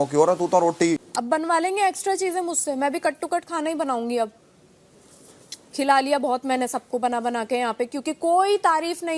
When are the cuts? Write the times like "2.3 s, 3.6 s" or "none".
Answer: 1.1 s